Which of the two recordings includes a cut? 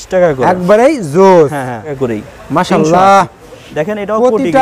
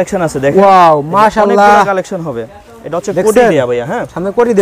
first; 1 cut; at 1.9 s

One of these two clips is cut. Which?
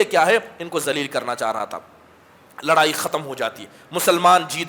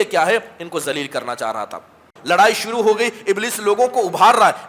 second; 1 cut; at 2.1 s

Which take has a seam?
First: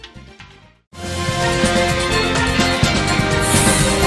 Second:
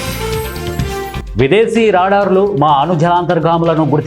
second; 1 cut; at 1.0 s

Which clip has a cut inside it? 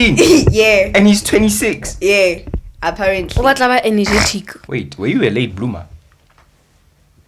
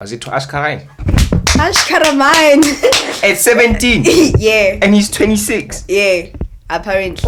first; 1 cut; at 4.5 s

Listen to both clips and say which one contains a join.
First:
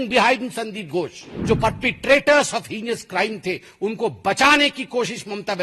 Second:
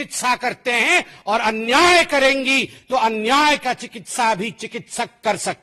first; 1 cut; at 1.3 s

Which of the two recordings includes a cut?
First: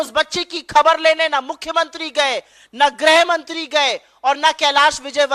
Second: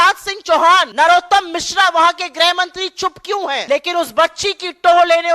second; 2 cuts; at 0.9 s, 3.6 s

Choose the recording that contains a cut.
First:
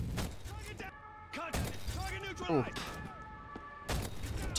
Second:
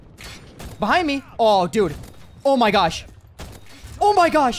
first; 1 cut; at 2.8 s

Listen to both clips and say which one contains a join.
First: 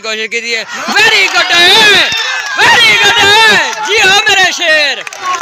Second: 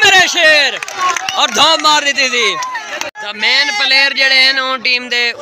second; 1 cut; at 3.2 s

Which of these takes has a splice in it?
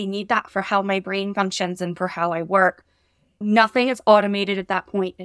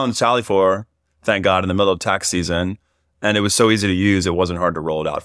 first; 1 cut; at 3.4 s

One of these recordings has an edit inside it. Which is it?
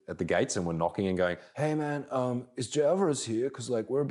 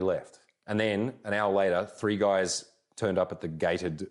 first; 1 cut; at 1.4 s

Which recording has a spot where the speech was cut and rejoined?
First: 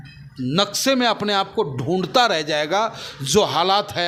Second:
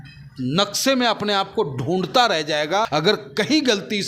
second; 1 cut; at 2.9 s

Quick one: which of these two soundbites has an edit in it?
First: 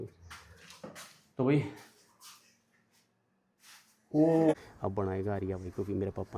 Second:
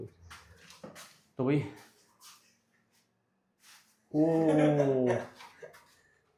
first; 1 cut; at 4.5 s

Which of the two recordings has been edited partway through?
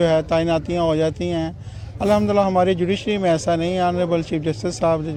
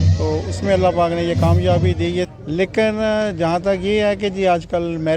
second; 1 cut; at 2.3 s

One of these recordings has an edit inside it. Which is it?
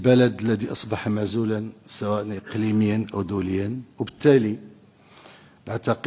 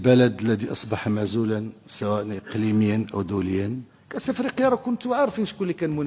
second; 1 cut; at 3.8 s

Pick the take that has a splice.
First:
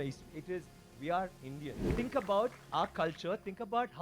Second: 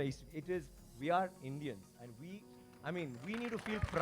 first; 1 cut; at 1.9 s

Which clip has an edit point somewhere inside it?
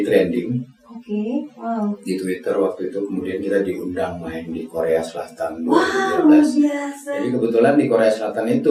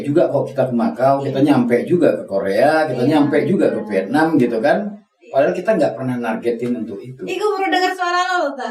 second; 1 cut; at 7.2 s

